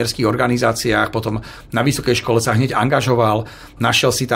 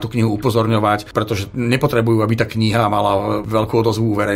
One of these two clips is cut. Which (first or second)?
second